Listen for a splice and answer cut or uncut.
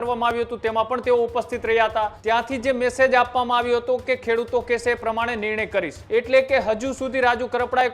cut